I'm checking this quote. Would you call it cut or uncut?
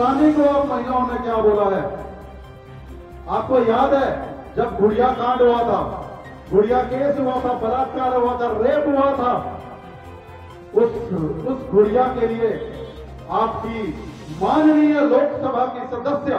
uncut